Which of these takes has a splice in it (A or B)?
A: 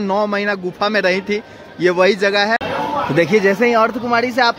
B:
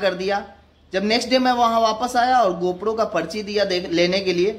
A